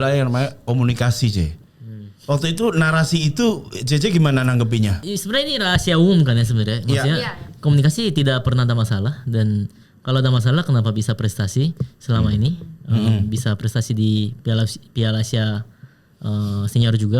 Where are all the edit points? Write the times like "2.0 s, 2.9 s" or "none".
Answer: 5.0 s